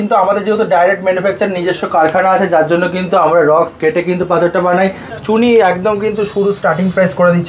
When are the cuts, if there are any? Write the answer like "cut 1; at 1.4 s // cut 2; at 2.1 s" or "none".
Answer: cut 1; at 5.1 s